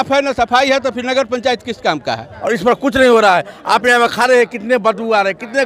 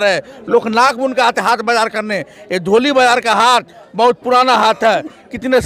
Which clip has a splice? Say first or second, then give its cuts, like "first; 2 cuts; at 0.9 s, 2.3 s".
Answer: first; 1 cut; at 2.3 s